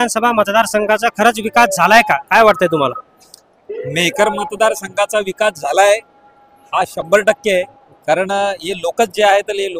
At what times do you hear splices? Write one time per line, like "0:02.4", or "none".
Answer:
none